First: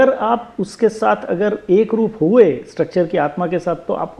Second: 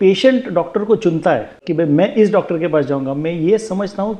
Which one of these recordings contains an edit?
second; 1 cut; at 1.6 s

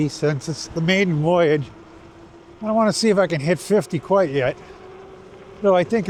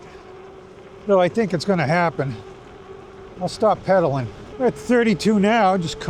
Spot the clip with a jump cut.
second; 1 cut; at 4.4 s

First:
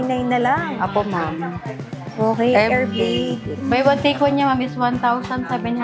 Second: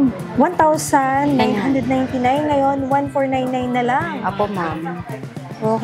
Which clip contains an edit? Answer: first; 1 cut; at 3.5 s

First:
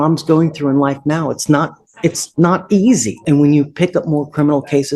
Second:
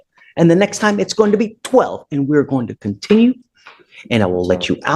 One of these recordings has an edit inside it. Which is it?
first; 1 cut; at 3.1 s

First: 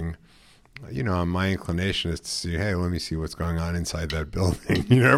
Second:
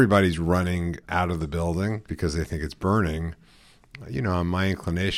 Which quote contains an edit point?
second; 2 cuts; at 1.0 s, 2.1 s

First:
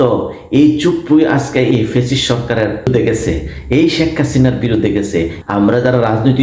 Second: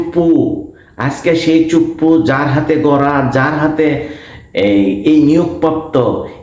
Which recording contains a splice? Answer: first; 2 cuts; at 2.9 s, 5.4 s

